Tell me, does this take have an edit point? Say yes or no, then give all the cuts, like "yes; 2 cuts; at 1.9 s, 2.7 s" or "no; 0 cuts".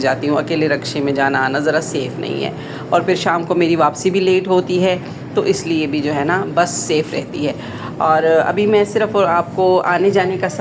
no; 0 cuts